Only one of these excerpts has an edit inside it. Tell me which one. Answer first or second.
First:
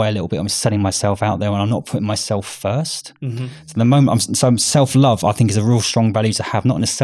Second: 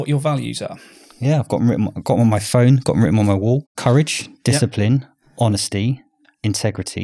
second